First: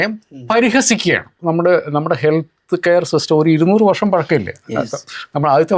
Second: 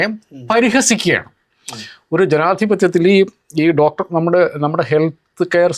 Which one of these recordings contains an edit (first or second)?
first